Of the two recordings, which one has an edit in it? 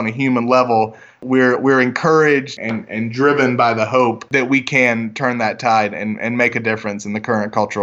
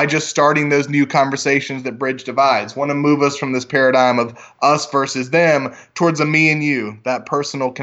first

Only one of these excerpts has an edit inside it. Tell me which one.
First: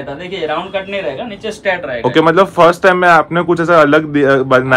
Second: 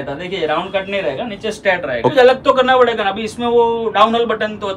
second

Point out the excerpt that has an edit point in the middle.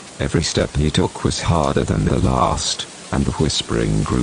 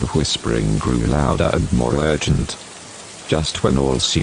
first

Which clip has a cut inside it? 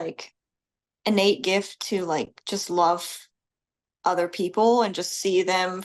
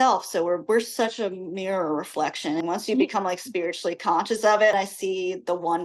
second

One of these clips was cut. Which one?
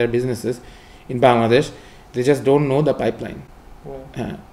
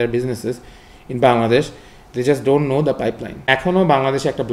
second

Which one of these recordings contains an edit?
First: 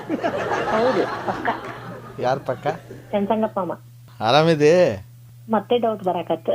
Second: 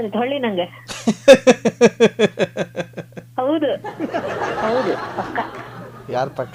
first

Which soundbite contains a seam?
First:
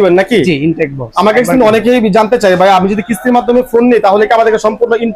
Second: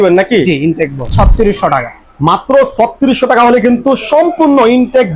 second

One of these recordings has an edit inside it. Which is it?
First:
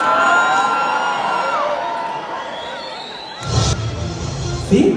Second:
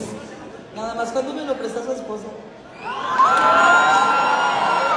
first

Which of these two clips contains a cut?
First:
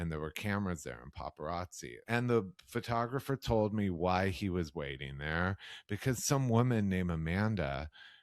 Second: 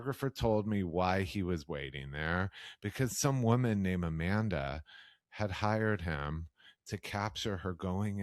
first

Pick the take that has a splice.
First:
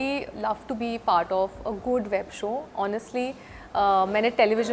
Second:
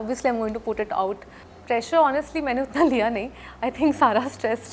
second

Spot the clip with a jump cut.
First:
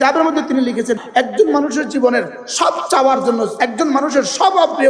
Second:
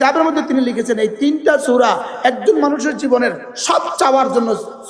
first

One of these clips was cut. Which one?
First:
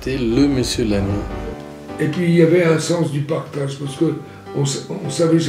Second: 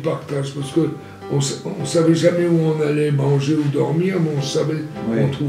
first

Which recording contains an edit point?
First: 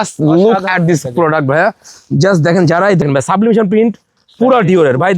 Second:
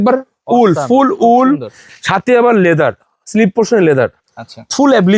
first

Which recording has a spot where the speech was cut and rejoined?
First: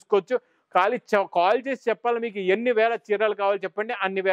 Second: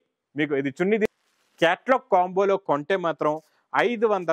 second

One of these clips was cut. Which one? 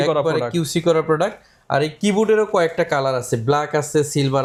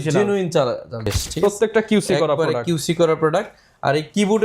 second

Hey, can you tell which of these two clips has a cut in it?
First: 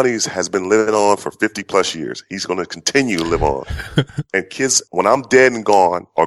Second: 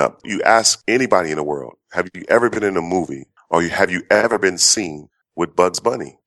first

